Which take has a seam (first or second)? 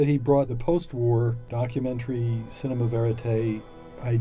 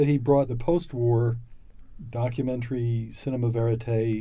first